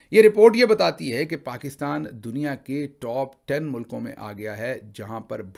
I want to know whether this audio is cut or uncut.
uncut